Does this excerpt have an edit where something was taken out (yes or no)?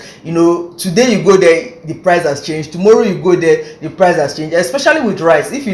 no